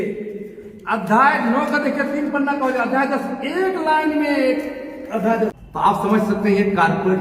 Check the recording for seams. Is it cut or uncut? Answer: cut